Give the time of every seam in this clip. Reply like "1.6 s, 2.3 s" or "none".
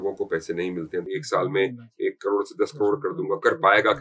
1.1 s